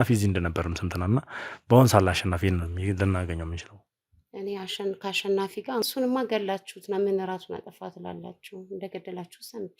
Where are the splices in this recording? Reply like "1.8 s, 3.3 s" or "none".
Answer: 5.8 s